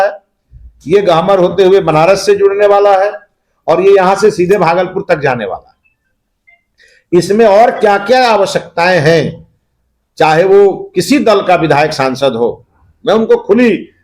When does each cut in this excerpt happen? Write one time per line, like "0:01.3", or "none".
none